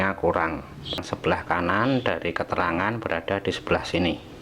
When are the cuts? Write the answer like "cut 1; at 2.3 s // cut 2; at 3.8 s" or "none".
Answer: cut 1; at 1.0 s